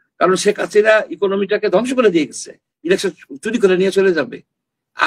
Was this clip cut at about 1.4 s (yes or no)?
no